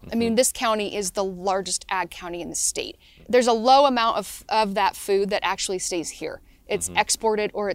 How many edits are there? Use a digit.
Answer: 1